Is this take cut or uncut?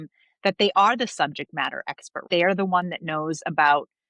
cut